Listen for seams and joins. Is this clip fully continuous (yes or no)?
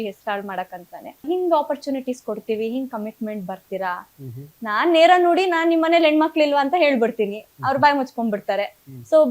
no